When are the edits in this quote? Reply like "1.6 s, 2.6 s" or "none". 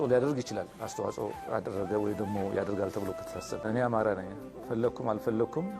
3.6 s